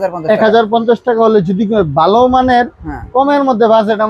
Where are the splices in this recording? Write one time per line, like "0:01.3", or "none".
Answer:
none